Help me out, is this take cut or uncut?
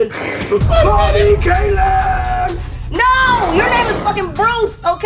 uncut